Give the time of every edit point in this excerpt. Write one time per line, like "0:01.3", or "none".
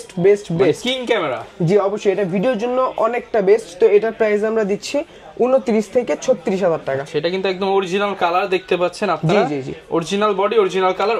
none